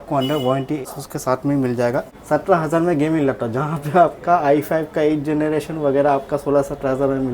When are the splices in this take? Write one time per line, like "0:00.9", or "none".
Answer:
0:00.9
0:02.1